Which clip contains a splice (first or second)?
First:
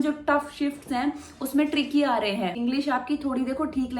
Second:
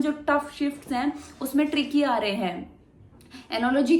first